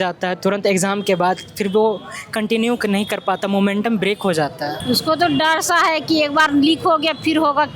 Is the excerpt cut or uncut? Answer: cut